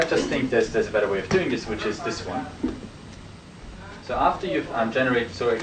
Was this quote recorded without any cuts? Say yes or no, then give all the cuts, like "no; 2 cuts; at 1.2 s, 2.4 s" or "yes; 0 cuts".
yes; 0 cuts